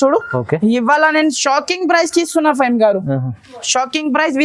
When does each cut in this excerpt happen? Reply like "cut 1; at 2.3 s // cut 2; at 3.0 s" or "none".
none